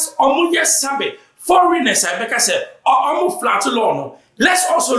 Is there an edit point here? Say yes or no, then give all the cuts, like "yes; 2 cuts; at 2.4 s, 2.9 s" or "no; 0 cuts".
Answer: no; 0 cuts